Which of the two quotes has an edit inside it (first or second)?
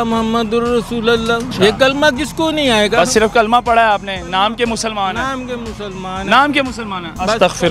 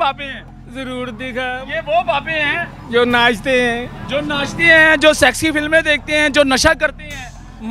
first